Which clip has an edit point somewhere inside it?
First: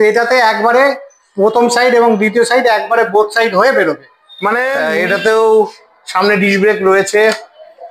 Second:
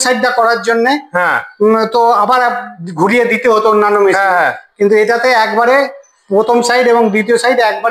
first; 1 cut; at 4.8 s

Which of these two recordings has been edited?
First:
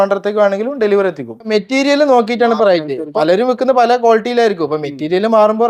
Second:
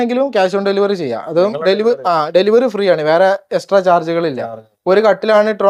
first; 2 cuts; at 1.5 s, 3.0 s

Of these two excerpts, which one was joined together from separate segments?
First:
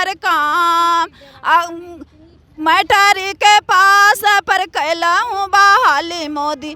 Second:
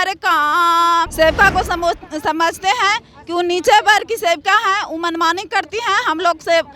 second; 1 cut; at 1.1 s

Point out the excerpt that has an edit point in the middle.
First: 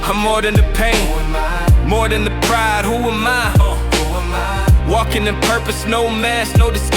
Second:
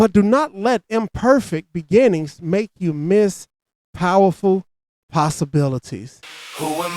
second; 1 cut; at 6.1 s

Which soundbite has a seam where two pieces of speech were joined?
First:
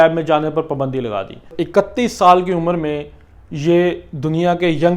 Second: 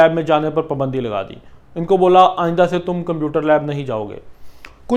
first; 1 cut; at 1.5 s

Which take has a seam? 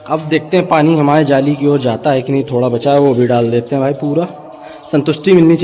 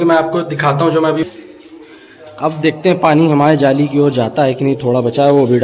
second; 1 cut; at 1.3 s

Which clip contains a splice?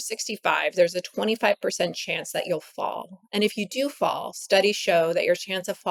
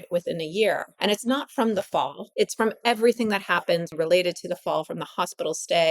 second; 3 cuts; at 0.9 s, 2.2 s, 3.9 s

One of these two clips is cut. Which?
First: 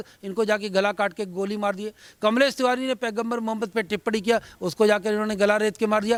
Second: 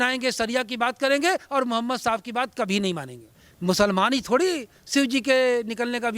second; 1 cut; at 3.5 s

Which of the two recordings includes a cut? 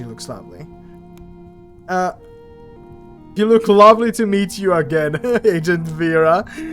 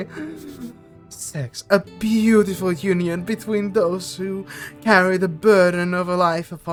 first; 1 cut; at 3.4 s

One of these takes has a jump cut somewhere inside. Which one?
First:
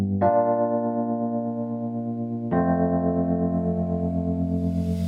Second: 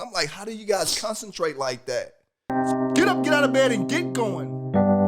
second; 1 cut; at 2.6 s

